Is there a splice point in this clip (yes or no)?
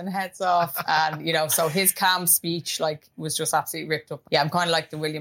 yes